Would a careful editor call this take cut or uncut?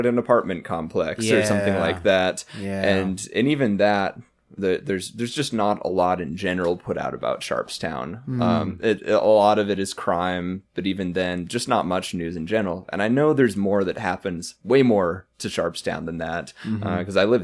uncut